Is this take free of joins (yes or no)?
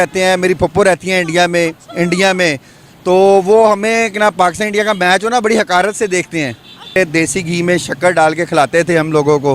no